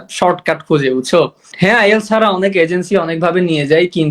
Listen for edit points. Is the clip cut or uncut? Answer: cut